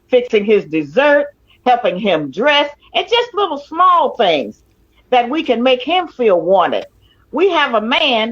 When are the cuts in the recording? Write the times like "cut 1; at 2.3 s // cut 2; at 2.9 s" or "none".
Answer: cut 1; at 4.6 s